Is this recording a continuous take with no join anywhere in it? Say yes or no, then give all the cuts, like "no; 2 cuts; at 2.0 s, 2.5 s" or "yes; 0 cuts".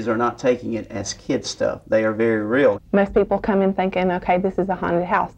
no; 1 cut; at 2.8 s